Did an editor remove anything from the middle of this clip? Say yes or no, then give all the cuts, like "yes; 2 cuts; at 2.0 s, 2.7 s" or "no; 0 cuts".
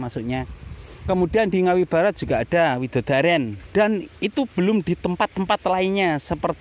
yes; 1 cut; at 3.6 s